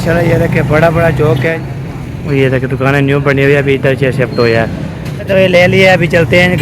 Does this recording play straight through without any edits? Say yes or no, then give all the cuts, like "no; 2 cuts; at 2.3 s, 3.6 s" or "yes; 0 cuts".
no; 2 cuts; at 1.6 s, 5.2 s